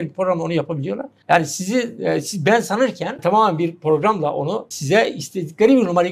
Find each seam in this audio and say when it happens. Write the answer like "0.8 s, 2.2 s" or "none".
1.1 s, 3.2 s, 4.7 s